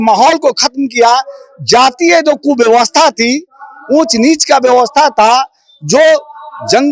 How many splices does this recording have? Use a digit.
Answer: 0